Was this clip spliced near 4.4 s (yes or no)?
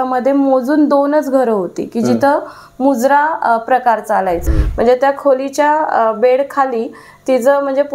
yes